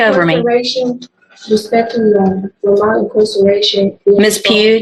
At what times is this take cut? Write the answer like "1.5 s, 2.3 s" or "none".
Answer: none

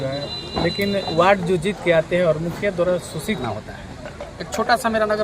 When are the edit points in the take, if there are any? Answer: 3.4 s

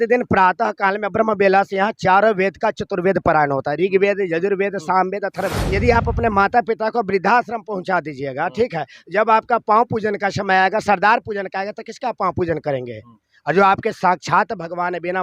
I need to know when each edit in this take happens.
5.6 s

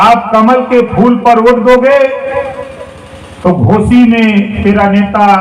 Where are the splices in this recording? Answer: none

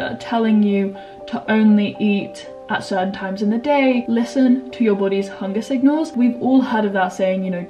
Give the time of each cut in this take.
4.0 s, 6.1 s

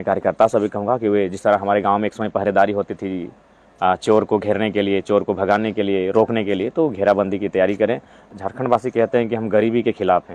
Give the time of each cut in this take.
8.3 s

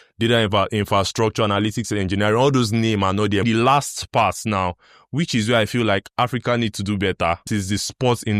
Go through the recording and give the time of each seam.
3.4 s, 7.4 s

